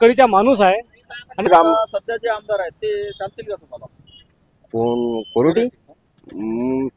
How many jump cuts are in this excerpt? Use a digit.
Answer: 1